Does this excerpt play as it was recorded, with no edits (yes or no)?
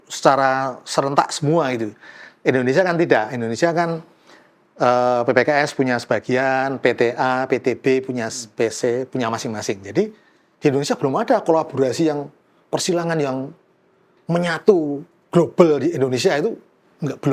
yes